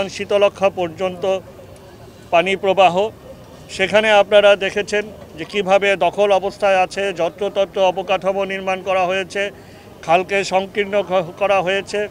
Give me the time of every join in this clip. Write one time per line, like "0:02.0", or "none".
none